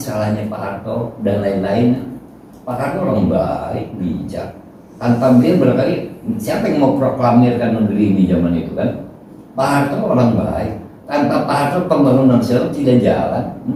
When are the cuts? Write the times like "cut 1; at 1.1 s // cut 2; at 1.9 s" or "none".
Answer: none